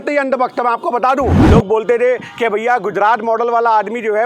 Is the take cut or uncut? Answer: cut